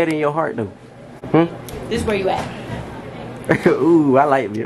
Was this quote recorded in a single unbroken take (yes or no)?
no